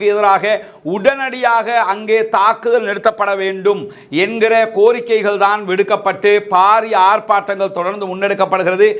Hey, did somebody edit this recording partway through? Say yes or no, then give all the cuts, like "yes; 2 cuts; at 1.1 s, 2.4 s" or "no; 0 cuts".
no; 0 cuts